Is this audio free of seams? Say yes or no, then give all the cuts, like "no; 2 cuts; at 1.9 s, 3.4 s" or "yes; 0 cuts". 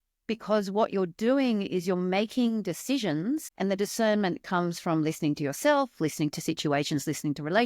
no; 1 cut; at 3.5 s